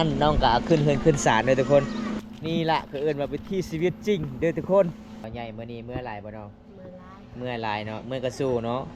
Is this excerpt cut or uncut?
cut